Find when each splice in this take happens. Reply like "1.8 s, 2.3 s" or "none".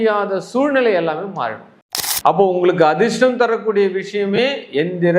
1.6 s